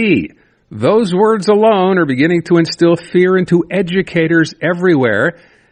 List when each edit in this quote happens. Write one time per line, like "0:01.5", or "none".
none